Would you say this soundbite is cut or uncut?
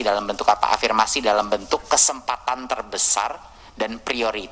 uncut